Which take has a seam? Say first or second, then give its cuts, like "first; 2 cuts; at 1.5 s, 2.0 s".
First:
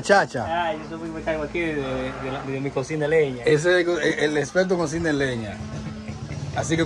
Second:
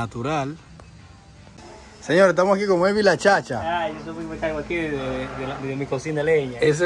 second; 1 cut; at 1.6 s